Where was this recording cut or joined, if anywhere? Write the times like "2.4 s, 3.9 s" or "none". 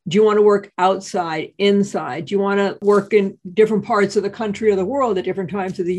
2.8 s